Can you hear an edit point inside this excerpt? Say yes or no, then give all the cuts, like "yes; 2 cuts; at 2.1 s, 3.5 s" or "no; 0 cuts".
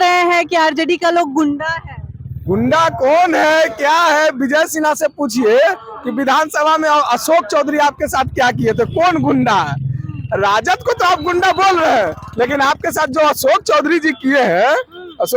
no; 0 cuts